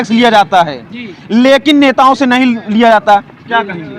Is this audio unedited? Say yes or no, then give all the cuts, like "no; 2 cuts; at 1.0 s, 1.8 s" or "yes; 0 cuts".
yes; 0 cuts